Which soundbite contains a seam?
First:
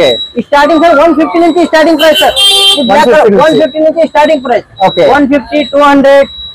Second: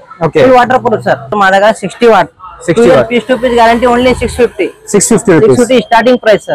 second; 1 cut; at 1.3 s

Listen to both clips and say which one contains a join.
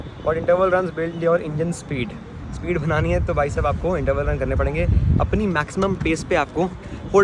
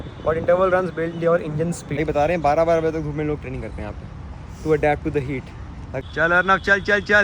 second; 2 cuts; at 1.8 s, 5.9 s

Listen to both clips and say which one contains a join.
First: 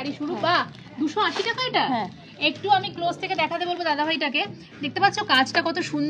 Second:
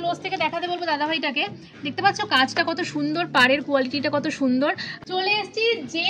second; 1 cut; at 4.9 s

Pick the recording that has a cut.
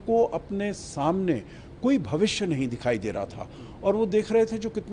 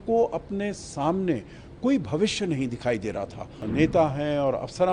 second; 1 cut; at 3.6 s

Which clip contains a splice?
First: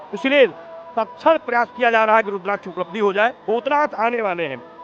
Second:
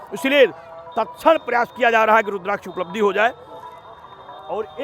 first; 1 cut; at 3.4 s

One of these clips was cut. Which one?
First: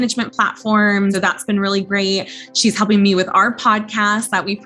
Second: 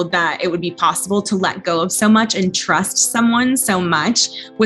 first; 1 cut; at 1.2 s

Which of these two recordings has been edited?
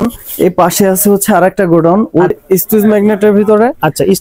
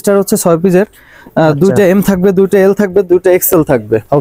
first; 1 cut; at 2.4 s

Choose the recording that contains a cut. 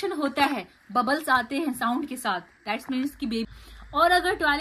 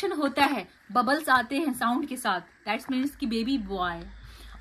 first; 1 cut; at 3.4 s

